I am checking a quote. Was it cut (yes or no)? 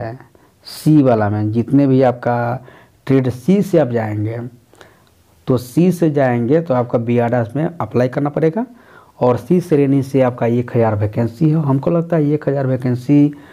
no